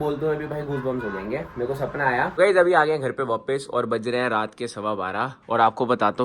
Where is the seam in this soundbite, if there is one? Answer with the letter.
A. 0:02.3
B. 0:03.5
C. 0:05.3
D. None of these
A